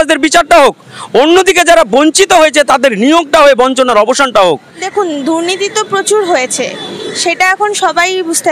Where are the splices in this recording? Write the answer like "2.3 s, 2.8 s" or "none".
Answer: 4.8 s